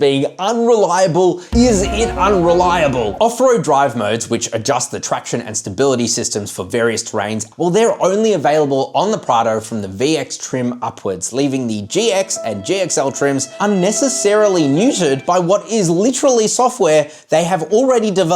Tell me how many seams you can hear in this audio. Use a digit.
2